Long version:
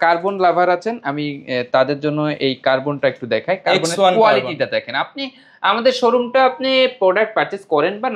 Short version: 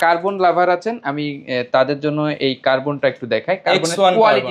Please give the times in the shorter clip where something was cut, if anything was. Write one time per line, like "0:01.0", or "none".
none